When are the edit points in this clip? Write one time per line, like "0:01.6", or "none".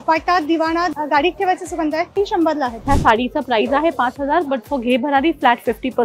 0:00.9
0:02.4